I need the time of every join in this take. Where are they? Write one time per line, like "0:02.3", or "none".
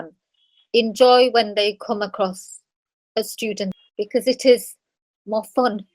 0:03.7